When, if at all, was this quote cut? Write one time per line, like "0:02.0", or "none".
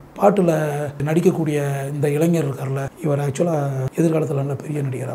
0:01.0
0:02.9
0:03.8